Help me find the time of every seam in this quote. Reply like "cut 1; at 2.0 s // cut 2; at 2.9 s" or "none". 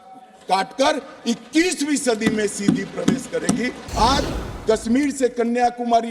cut 1; at 3.8 s

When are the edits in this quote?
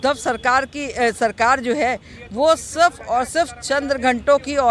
none

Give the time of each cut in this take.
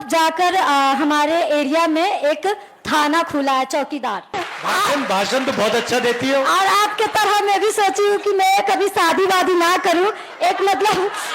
cut 1; at 4.4 s

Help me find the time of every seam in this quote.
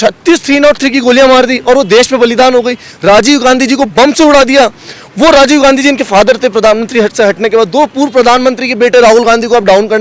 none

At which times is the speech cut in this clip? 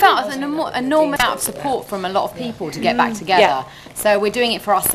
cut 1; at 1.2 s

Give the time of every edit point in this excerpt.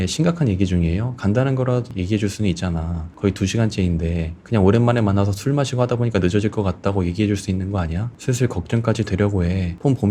none

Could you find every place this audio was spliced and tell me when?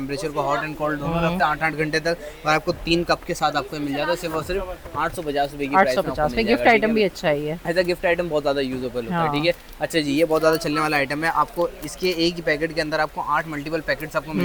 none

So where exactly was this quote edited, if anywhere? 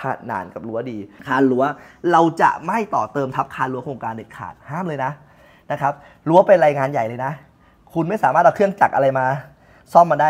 cut 1; at 1.1 s

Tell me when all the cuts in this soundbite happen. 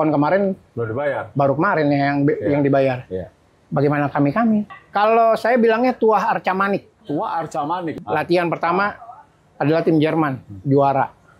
cut 1; at 4.8 s // cut 2; at 6.9 s // cut 3; at 7.9 s

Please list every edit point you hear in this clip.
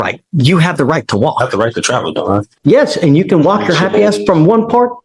cut 1; at 2.5 s

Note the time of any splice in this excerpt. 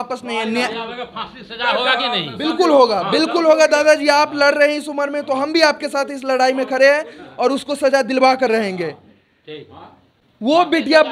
none

